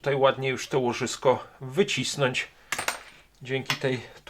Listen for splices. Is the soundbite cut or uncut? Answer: uncut